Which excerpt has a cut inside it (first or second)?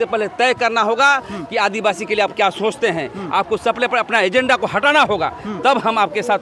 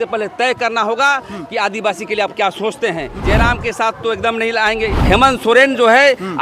second